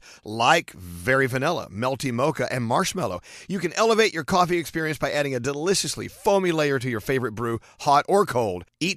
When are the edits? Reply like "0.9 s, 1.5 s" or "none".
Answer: none